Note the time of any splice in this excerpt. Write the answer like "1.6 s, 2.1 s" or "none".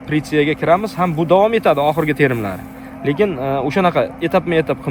none

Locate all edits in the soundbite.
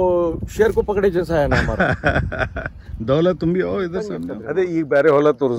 4.5 s

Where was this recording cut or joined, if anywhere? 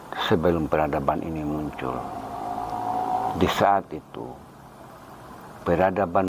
3.3 s

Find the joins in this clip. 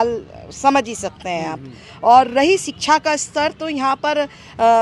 none

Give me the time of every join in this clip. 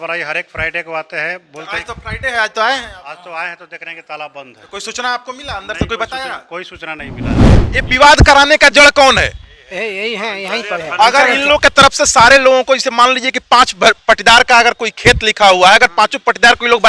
7.5 s

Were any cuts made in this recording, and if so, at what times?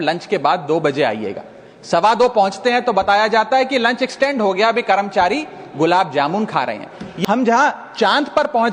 7.1 s

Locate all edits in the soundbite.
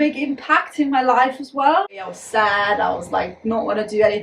1.9 s

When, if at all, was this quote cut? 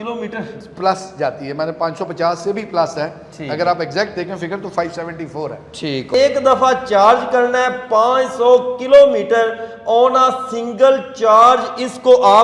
6.1 s

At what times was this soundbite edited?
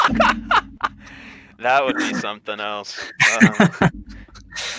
none

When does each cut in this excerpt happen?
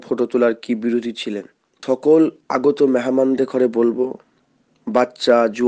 1.8 s

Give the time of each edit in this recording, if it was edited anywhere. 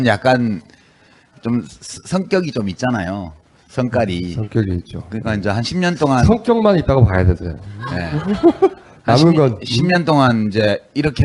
2.3 s

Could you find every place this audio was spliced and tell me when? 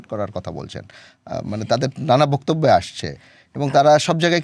none

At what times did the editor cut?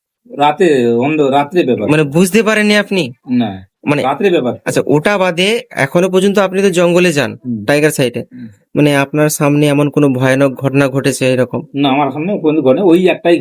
none

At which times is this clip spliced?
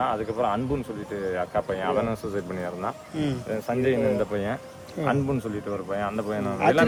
none

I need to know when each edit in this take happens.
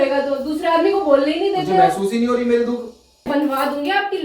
3.3 s

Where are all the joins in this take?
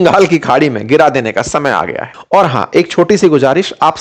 2.1 s

